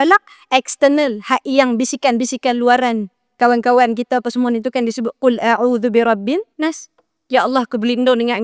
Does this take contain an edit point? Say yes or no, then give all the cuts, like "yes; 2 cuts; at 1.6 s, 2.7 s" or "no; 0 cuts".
yes; 1 cut; at 6.5 s